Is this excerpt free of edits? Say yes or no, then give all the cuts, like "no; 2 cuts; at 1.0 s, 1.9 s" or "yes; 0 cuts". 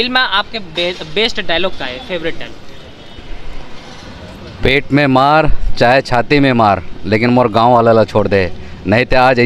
yes; 0 cuts